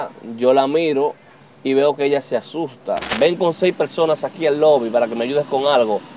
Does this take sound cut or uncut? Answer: cut